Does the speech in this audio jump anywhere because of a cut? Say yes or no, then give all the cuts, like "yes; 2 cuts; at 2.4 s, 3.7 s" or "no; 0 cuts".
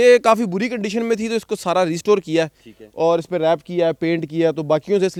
no; 0 cuts